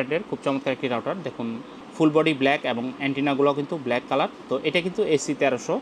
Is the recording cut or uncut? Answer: uncut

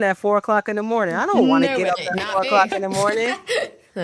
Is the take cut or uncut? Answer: uncut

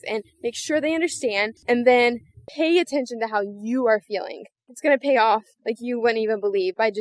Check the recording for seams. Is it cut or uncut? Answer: cut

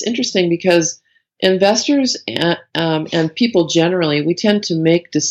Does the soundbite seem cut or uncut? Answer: uncut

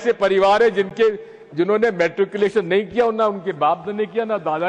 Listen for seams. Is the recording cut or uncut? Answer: uncut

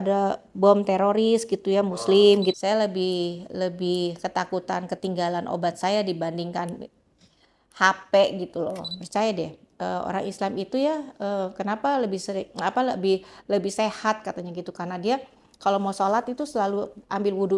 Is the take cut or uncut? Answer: cut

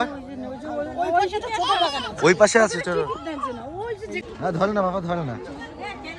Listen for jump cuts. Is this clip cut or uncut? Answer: cut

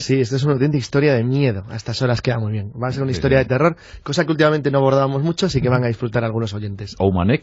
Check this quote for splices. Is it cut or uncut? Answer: uncut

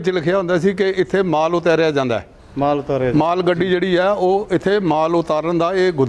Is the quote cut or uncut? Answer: uncut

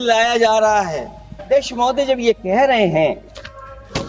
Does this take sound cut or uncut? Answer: cut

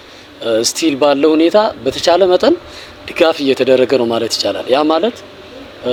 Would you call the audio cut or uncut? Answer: uncut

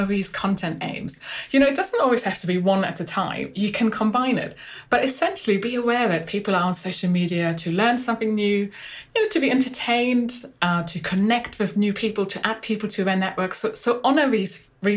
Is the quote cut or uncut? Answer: uncut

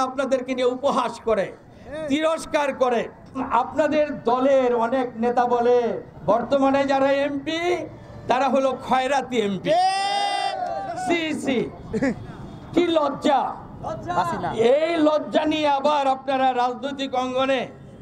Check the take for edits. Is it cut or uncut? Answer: cut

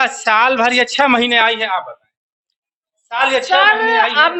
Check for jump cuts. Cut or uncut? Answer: uncut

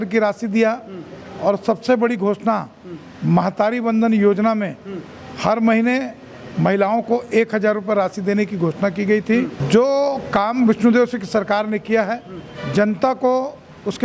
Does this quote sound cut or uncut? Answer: cut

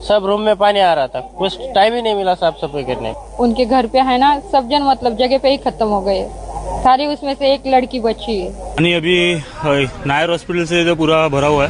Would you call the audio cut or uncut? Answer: cut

